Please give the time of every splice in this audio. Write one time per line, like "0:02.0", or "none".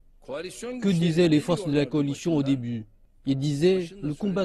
none